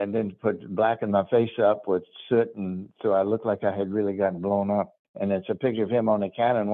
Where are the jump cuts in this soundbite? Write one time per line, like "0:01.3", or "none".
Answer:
0:05.0